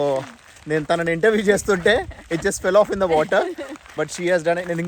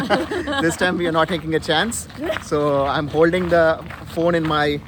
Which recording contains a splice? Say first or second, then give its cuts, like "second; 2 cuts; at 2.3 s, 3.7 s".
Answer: first; 1 cut; at 3.8 s